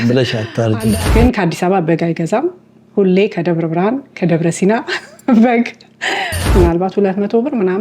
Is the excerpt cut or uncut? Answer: cut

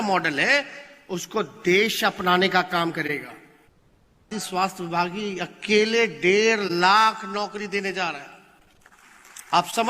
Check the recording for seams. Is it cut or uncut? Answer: cut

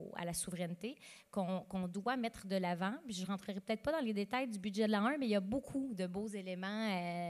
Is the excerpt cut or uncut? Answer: uncut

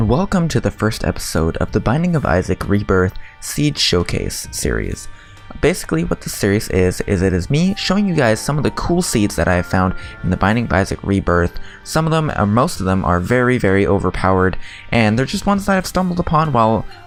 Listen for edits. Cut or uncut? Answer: uncut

